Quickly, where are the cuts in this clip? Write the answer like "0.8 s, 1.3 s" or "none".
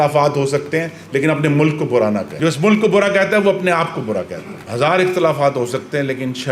2.3 s, 4.6 s